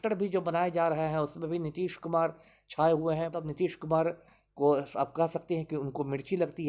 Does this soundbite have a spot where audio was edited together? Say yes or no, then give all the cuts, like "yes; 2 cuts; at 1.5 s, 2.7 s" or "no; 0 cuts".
yes; 1 cut; at 3.4 s